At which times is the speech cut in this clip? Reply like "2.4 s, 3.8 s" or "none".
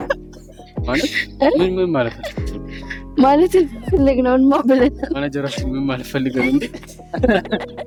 none